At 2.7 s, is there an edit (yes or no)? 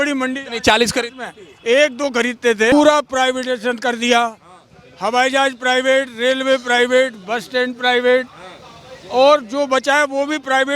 yes